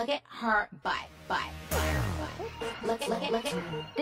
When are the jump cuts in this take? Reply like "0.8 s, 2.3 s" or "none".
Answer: none